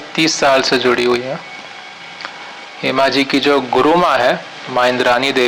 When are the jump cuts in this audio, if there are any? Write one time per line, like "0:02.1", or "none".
none